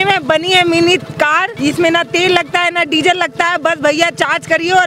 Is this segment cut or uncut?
cut